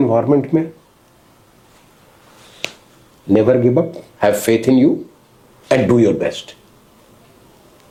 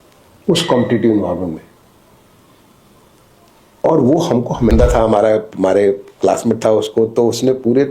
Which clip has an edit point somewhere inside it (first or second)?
second